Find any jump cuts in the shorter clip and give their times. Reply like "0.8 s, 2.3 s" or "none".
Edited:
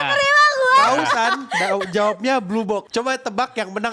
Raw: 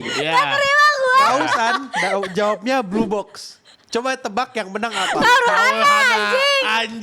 2.9 s

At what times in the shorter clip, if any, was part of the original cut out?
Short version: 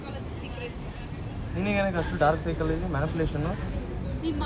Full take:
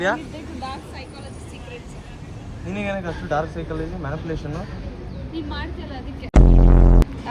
none

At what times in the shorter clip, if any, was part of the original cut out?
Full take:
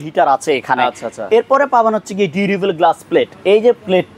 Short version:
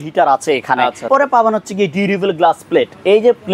1.1 s

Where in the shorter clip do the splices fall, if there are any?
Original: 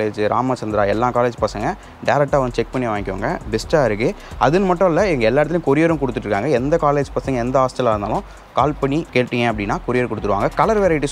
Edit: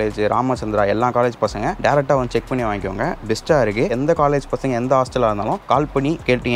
1.8 s, 4.0 s, 5.6 s

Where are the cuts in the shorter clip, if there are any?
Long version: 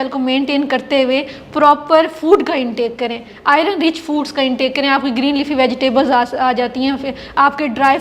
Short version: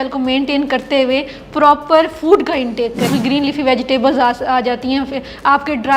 3.1 s

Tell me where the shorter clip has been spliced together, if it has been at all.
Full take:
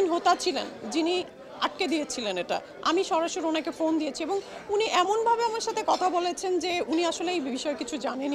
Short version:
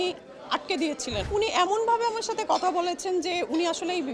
1.2 s

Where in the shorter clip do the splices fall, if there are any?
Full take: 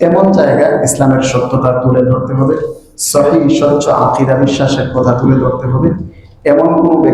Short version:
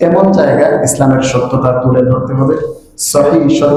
none

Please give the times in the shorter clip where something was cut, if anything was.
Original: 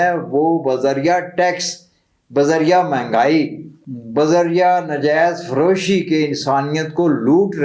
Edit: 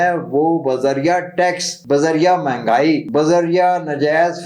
1.7 s, 3.1 s

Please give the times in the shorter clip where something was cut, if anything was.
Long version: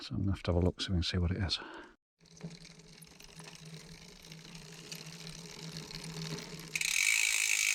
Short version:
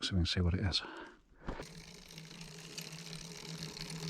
1.6 s

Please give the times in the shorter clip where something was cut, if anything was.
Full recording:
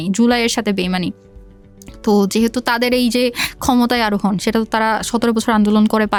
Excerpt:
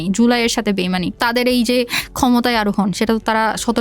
1.2 s

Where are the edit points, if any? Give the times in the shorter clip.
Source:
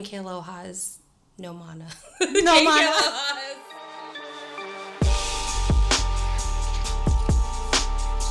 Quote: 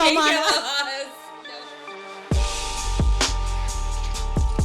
1.2 s

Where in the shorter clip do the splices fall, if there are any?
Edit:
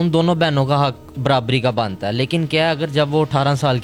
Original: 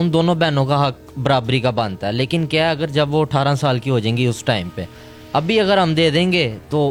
none

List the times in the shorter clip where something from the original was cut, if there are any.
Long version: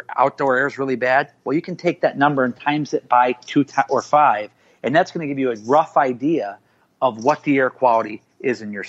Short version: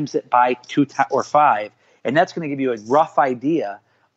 none

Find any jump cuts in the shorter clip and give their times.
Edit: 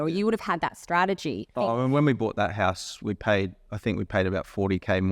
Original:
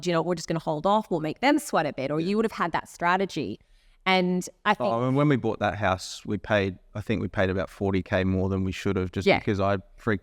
1.5 s

